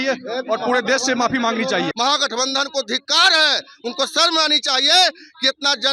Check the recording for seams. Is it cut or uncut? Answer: cut